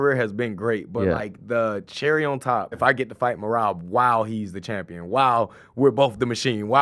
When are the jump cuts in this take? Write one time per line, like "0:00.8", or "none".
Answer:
0:02.8